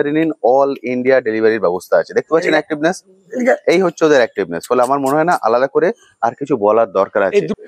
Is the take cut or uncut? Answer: uncut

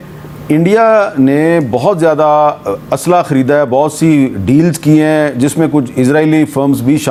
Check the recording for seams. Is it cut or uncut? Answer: uncut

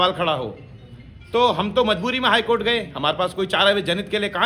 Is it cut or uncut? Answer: uncut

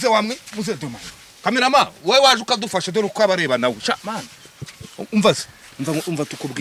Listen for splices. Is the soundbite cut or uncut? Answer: uncut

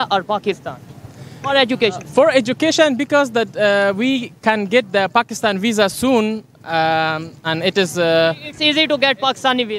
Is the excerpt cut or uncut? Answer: uncut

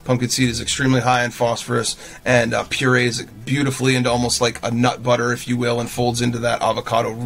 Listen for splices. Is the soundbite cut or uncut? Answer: uncut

